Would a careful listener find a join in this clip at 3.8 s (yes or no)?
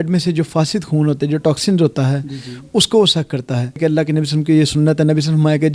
yes